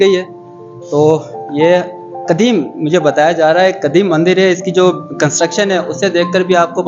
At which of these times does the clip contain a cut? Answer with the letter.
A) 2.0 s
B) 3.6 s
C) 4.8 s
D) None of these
D